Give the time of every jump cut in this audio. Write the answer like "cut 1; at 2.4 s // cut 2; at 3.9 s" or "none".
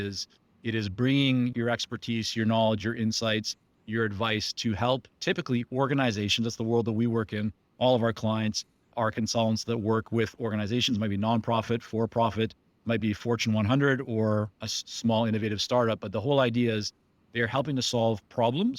cut 1; at 1.5 s